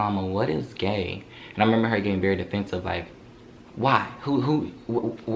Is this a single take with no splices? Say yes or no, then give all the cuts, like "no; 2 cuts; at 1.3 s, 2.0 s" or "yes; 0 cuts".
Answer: yes; 0 cuts